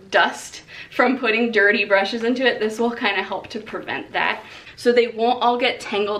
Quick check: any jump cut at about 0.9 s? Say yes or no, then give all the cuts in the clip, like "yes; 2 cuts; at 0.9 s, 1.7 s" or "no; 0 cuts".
no; 1 cut; at 4.6 s